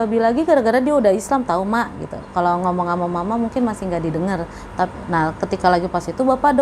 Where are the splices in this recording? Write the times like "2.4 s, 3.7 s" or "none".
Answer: none